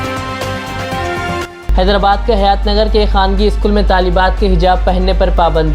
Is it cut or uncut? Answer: cut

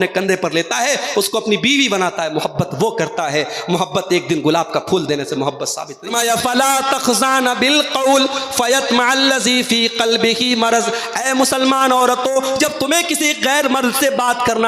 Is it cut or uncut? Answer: cut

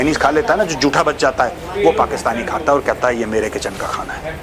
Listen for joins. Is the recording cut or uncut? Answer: uncut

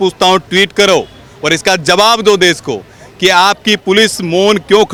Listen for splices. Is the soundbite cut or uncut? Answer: uncut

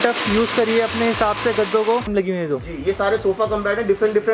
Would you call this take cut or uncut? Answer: cut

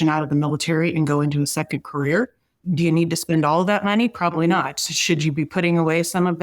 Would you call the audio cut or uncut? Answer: cut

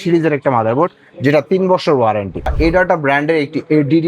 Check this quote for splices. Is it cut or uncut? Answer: cut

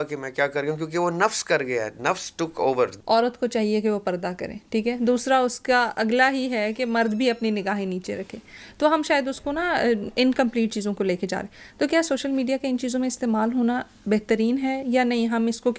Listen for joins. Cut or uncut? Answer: cut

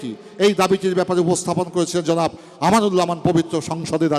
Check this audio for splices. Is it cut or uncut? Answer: uncut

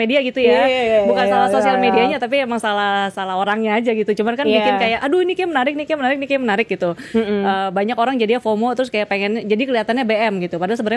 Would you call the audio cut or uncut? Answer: uncut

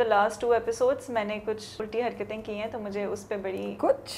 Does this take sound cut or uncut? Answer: cut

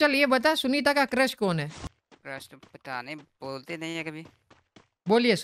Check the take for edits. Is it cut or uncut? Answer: cut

